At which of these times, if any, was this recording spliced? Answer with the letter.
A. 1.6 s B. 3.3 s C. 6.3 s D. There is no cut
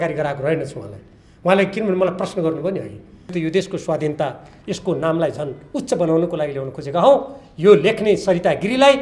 B